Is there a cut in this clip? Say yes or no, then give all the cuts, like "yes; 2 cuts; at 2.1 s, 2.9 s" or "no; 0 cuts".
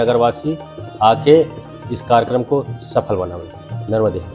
no; 0 cuts